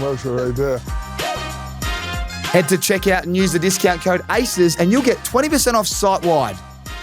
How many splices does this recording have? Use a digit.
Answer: 2